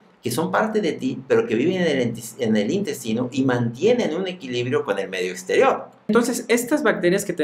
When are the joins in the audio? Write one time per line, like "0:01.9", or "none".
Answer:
0:06.1